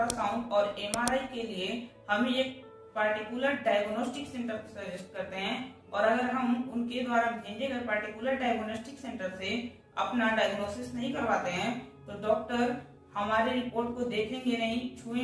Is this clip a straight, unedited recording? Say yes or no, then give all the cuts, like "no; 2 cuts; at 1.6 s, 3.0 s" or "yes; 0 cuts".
yes; 0 cuts